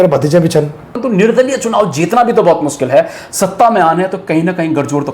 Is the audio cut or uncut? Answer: cut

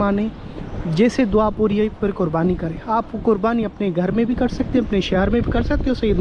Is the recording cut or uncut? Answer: uncut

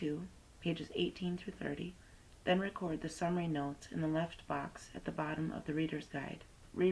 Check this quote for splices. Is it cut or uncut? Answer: uncut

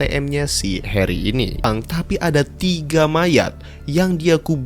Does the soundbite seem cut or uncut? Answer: cut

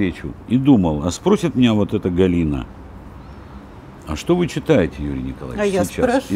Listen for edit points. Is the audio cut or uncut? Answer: uncut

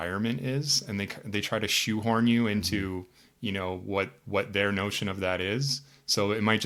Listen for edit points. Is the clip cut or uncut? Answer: uncut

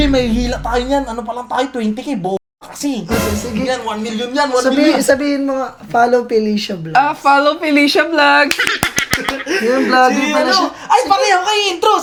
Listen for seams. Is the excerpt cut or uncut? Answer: uncut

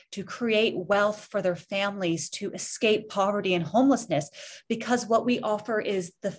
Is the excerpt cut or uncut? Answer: uncut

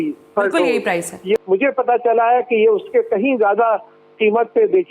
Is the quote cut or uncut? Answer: cut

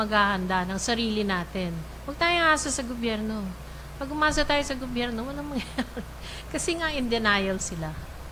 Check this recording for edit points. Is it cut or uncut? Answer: uncut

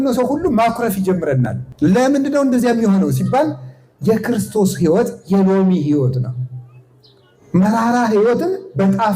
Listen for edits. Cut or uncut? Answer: cut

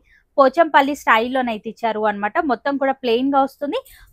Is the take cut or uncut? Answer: uncut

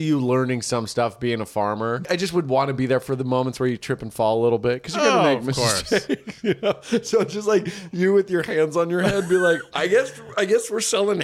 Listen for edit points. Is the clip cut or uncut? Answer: cut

